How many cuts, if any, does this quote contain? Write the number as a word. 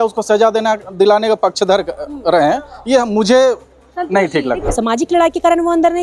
one